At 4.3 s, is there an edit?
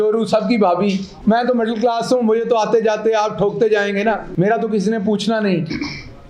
yes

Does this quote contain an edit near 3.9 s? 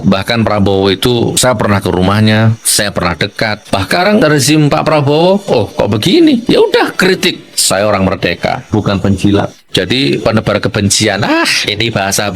yes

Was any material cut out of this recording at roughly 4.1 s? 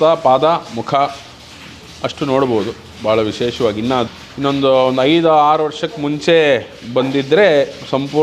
yes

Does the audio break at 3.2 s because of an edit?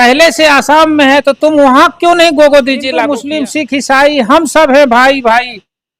yes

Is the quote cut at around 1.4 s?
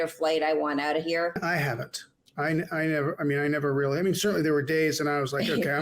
yes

